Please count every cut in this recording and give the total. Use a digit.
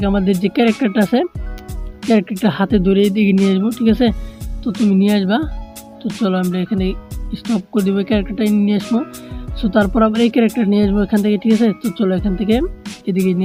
0